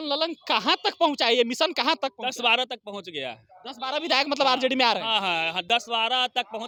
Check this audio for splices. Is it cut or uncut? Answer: uncut